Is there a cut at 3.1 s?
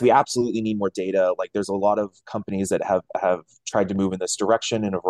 no; 0 cuts

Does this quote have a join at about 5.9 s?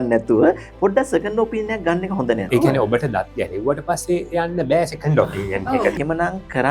yes; 2 cuts; at 2.5 s, 5.9 s

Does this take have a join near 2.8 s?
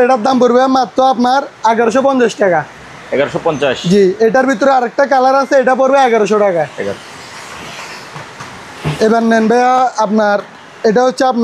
no; 0 cuts

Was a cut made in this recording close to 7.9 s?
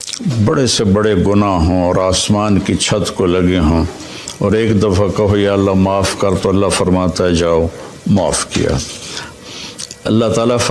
no; 1 cut; at 9.3 s

